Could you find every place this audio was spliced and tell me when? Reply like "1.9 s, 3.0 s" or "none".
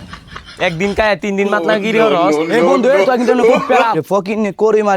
4.0 s